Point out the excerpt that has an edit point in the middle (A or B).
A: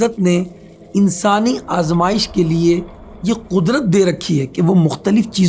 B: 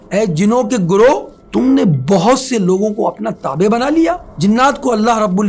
B